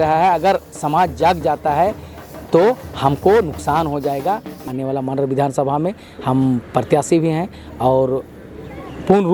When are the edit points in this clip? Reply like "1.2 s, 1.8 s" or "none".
4.5 s